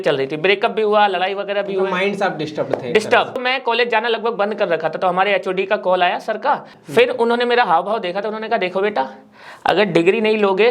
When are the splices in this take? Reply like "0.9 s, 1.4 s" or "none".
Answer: 3.4 s, 6.8 s